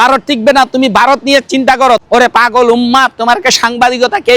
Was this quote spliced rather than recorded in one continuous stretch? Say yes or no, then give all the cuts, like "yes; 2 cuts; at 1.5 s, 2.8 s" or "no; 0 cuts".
yes; 1 cut; at 2.0 s